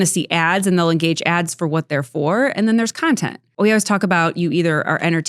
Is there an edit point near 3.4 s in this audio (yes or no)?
yes